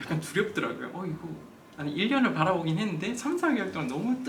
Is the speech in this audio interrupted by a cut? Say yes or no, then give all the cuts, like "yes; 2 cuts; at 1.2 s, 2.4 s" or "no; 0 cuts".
no; 0 cuts